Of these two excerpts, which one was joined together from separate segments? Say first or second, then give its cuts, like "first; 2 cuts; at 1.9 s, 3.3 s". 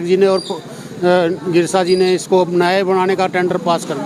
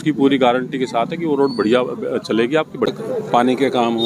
second; 1 cut; at 3.0 s